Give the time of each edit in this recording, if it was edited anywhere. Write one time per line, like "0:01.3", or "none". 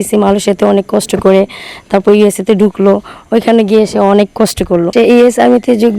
0:04.9